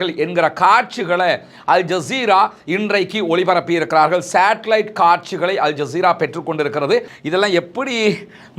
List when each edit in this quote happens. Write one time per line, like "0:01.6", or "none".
0:07.1